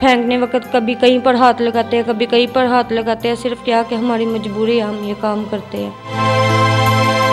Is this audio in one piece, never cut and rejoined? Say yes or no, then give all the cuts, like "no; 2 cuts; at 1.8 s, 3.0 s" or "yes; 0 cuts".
yes; 0 cuts